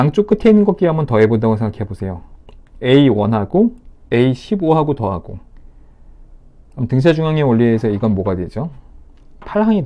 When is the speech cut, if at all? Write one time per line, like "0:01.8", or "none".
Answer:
none

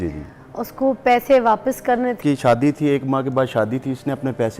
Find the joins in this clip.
0:02.2

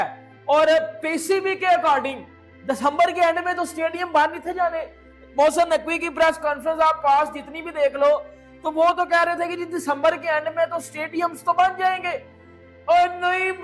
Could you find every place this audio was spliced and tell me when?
none

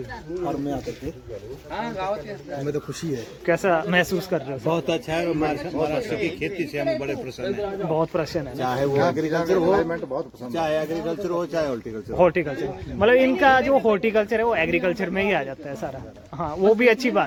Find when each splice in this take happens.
none

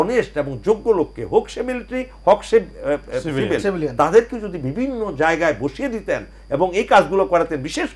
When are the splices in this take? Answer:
none

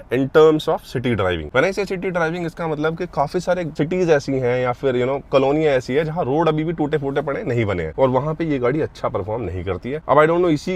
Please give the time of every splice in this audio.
none

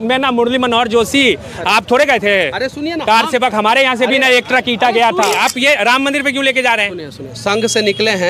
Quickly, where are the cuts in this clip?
0:05.5

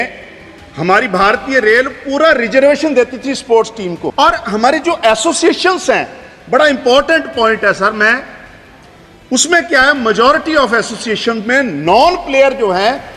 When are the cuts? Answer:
0:04.1

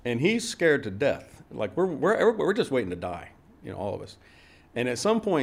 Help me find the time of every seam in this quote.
none

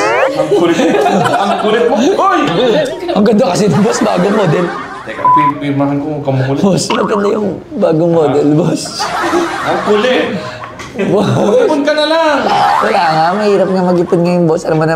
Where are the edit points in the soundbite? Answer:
none

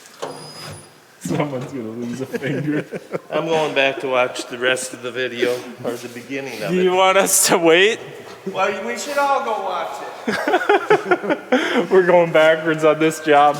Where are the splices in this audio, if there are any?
none

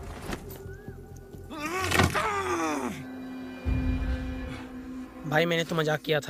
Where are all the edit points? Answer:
none

